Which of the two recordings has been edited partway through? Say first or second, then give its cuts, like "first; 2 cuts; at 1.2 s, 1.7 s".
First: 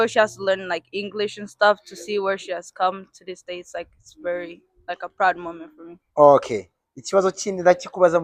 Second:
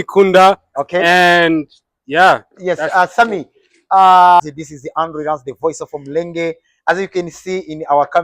second; 1 cut; at 4.4 s